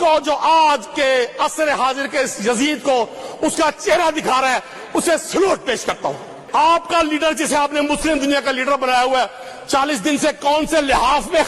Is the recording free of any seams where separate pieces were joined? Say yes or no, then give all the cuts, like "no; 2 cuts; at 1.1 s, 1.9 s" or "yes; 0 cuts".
no; 1 cut; at 6.3 s